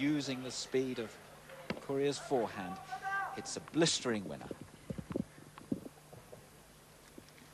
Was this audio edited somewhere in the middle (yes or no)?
no